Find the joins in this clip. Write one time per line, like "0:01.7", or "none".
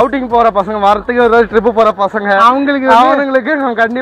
none